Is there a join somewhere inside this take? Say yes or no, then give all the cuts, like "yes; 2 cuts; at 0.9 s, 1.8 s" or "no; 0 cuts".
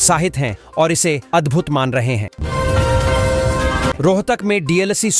yes; 2 cuts; at 2.3 s, 4.0 s